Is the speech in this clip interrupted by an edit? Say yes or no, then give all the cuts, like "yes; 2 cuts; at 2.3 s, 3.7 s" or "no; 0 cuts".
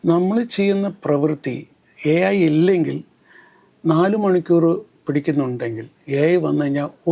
no; 0 cuts